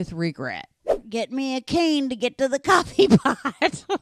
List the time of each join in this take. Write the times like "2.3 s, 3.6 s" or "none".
1.0 s